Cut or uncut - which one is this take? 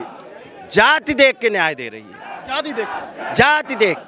uncut